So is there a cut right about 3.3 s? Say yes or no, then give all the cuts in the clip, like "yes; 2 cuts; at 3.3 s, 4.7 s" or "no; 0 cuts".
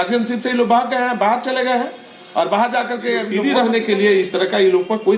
yes; 1 cut; at 3.3 s